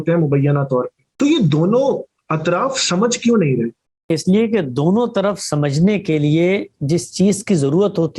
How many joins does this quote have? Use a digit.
2